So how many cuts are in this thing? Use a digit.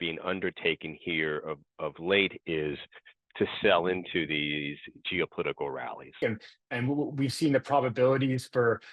1